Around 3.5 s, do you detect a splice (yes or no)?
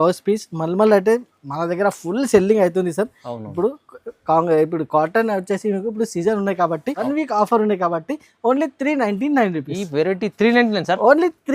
no